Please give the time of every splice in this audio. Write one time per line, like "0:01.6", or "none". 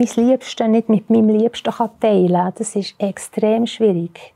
none